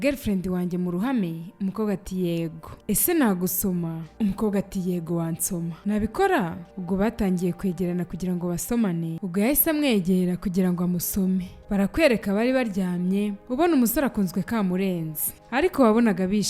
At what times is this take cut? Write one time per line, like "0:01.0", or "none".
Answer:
0:09.2
0:15.4